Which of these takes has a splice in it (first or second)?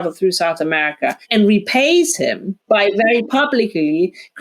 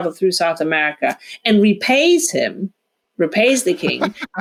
first